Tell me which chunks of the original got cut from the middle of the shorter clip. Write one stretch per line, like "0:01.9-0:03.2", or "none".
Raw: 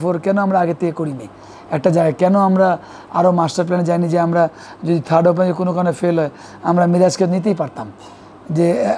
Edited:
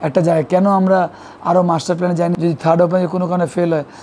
0:04.0-0:04.8